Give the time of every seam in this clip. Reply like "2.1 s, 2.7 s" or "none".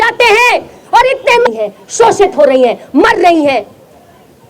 1.5 s